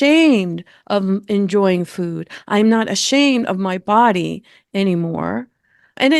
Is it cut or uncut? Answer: uncut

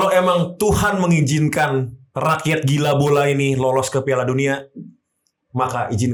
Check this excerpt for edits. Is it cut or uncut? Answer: uncut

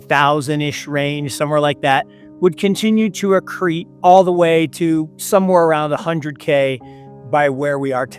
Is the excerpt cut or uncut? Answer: cut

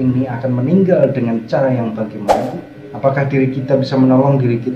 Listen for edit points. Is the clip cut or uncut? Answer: cut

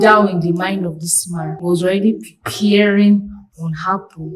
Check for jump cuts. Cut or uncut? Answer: cut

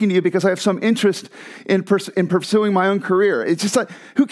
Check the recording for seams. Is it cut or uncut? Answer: uncut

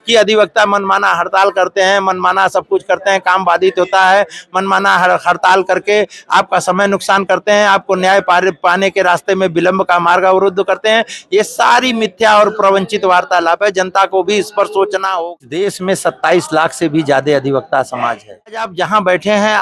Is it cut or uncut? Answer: cut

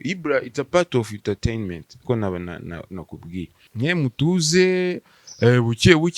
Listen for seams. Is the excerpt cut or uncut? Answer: cut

